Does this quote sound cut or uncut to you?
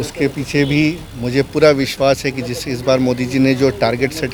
uncut